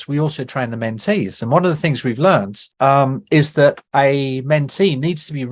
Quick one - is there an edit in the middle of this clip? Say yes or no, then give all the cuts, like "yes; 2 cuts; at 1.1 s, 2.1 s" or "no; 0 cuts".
yes; 2 cuts; at 2.6 s, 3.8 s